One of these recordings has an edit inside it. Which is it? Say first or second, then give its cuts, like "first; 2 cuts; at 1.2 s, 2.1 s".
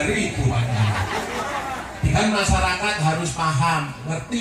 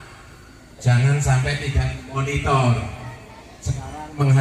first; 1 cut; at 2.2 s